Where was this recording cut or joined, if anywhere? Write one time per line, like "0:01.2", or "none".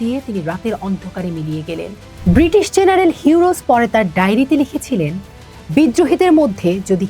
0:02.1